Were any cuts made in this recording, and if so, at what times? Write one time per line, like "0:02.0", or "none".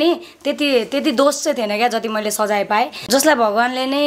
0:03.0